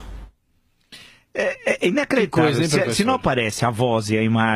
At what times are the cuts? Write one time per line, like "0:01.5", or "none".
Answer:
none

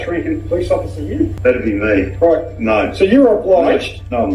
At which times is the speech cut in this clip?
0:01.3

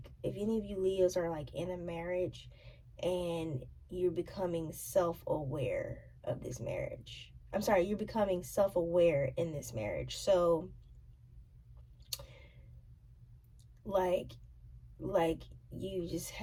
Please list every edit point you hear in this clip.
none

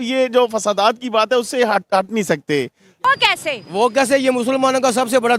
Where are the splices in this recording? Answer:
0:02.9

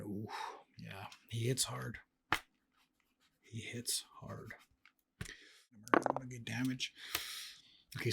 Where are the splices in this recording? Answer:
0:05.8

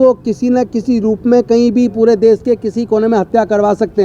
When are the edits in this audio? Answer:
none

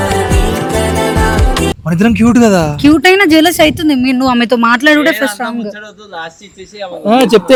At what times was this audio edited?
none

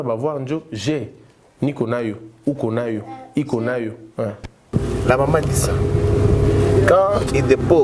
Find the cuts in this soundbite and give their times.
0:04.7

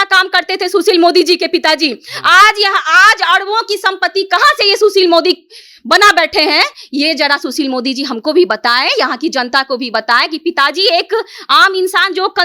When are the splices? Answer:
none

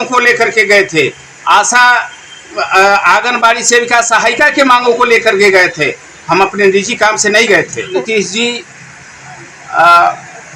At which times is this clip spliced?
0:07.9

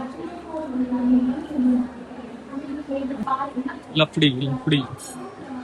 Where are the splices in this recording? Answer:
0:03.3

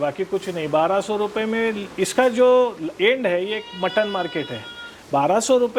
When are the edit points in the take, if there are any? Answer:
none

